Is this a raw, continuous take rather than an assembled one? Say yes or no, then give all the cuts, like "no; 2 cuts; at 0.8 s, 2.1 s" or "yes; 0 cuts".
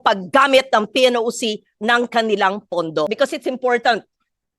no; 1 cut; at 3.1 s